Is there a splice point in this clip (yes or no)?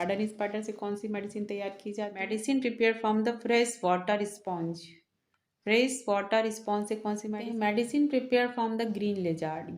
yes